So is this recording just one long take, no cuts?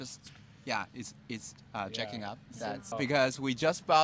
no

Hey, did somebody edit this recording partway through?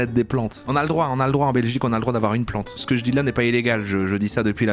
yes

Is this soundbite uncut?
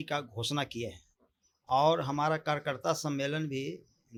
yes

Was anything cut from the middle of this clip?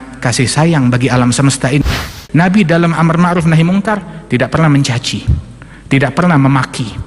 yes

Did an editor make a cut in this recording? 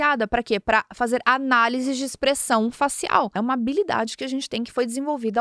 yes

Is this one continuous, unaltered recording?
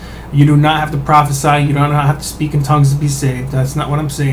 yes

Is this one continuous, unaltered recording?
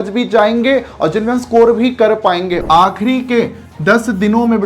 no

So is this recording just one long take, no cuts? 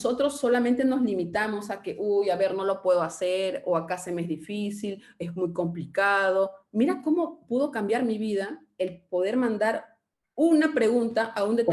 yes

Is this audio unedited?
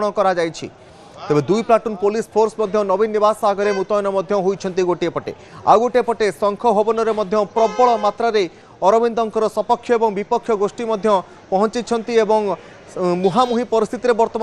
no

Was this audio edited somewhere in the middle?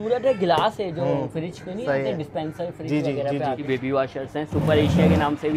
yes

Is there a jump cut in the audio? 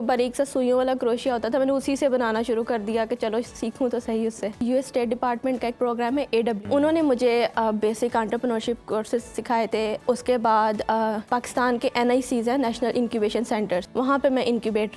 yes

